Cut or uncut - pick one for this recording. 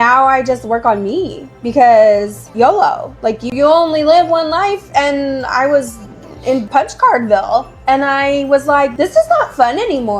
cut